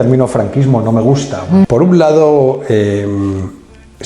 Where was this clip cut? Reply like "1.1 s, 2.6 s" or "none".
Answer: 1.7 s

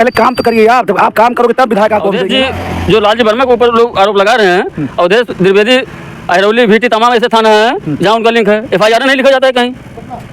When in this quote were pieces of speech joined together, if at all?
2.2 s

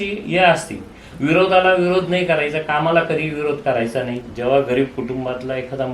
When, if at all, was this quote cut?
4.2 s

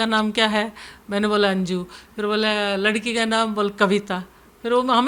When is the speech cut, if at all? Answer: none

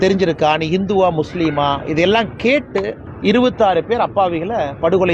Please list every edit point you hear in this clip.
none

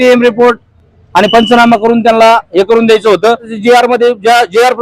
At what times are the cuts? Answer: 3.5 s

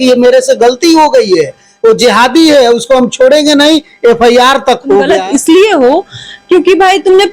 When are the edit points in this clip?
5.1 s

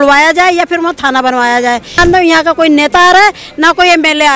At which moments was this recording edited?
2.0 s

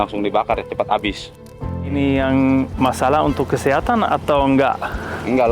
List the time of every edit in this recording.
1.8 s, 2.7 s

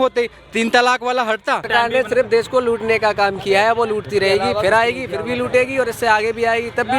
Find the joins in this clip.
1.7 s

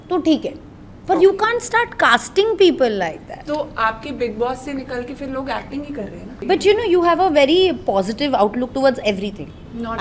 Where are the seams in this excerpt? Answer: 6.3 s

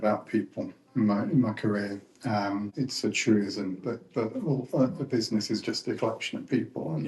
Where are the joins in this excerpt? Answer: 2.7 s

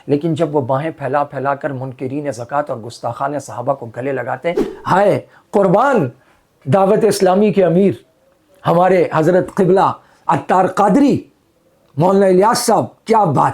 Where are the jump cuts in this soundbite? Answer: 4.7 s

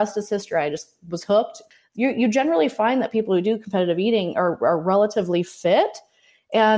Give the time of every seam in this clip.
1.6 s

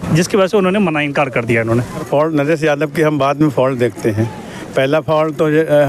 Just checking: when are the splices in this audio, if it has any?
2.0 s

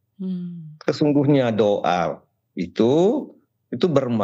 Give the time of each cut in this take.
none

